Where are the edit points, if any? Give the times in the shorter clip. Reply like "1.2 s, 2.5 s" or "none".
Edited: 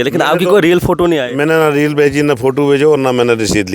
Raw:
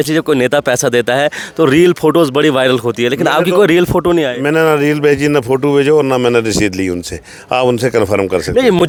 none

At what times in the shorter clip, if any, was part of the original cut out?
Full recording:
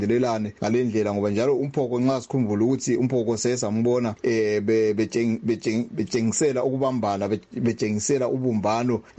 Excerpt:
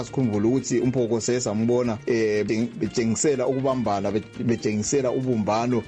2.5 s

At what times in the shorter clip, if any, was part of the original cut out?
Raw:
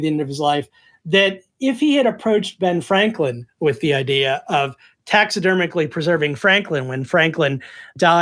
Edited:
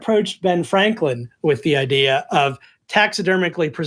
none

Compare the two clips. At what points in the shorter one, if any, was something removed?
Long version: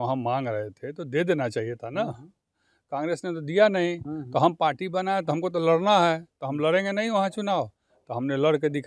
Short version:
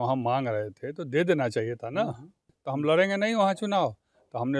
2.6 s

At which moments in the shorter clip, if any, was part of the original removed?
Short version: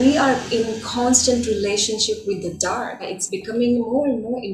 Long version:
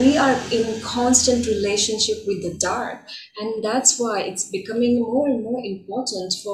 3.2 s

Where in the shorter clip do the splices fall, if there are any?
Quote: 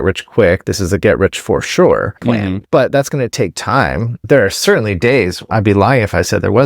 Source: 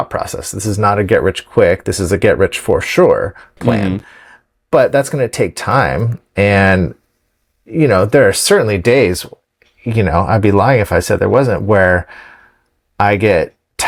2.2 s, 4.3 s, 5.5 s

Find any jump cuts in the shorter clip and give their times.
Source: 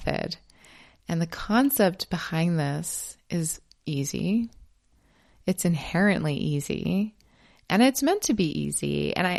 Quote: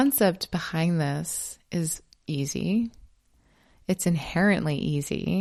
none

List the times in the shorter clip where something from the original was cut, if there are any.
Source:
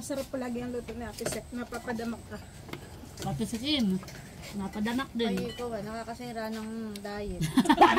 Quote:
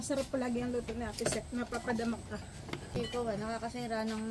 3.0 s

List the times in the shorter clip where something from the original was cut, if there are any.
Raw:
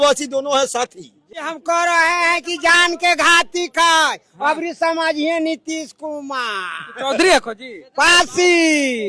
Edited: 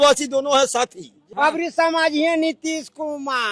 1.2 s

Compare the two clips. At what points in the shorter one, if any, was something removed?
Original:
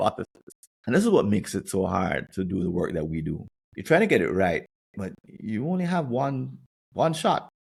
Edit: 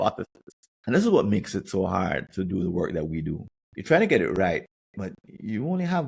none

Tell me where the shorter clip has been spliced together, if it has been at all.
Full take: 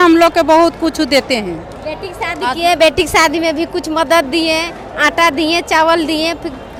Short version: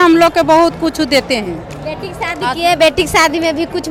none

